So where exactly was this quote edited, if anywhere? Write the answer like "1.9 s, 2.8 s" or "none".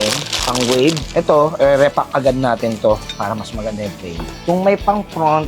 1.1 s, 4.3 s